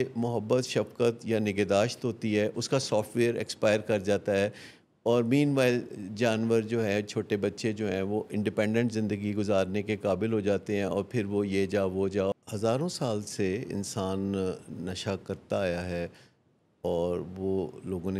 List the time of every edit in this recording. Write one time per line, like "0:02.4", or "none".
0:12.3